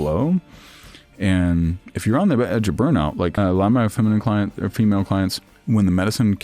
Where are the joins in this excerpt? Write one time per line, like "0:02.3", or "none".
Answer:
0:03.3
0:05.5